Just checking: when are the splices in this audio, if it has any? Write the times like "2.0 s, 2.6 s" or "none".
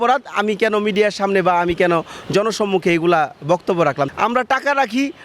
4.1 s

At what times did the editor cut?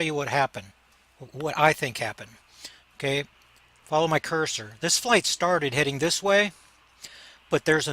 1.9 s

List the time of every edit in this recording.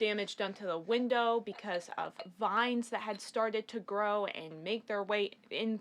none

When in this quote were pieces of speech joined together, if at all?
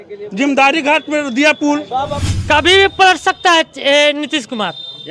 2.2 s

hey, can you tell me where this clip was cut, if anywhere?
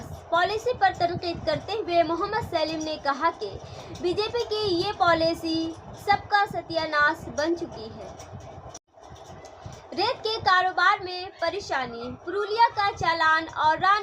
8.8 s

